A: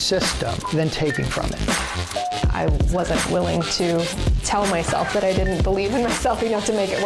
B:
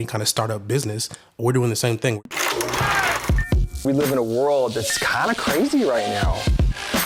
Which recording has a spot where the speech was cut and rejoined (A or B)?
B